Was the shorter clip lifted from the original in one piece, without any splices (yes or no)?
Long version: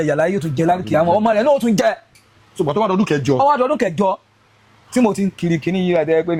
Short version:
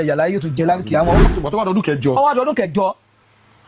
no